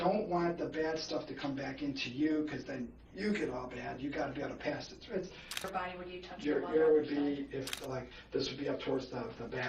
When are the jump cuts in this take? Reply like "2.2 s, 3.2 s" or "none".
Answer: 5.7 s, 7.7 s